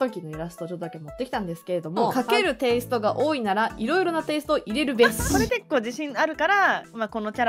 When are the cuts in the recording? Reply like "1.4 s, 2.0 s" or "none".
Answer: 2.1 s, 5.4 s